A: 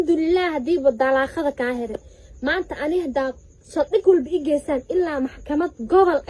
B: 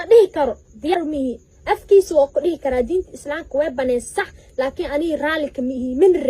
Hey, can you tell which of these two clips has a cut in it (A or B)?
B